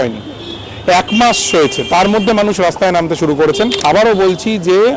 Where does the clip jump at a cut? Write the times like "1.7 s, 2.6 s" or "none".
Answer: 3.8 s